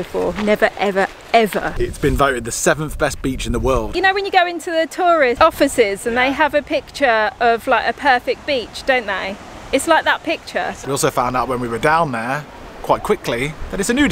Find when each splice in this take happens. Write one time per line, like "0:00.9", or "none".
0:01.7
0:03.9
0:05.4
0:10.8